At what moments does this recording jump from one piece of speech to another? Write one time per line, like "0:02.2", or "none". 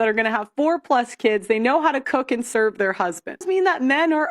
0:03.4